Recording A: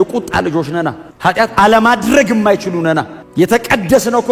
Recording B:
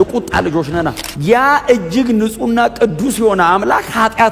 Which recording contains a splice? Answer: B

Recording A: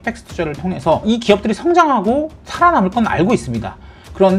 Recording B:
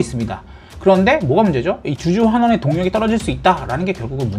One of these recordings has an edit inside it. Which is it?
A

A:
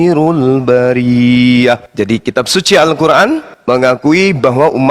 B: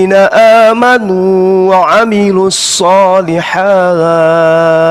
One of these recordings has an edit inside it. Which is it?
A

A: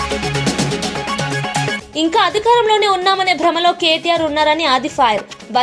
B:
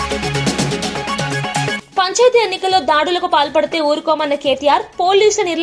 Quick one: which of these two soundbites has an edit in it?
B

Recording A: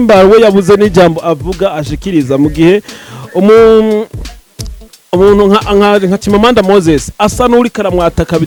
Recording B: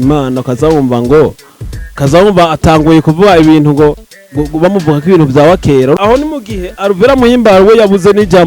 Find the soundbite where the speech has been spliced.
B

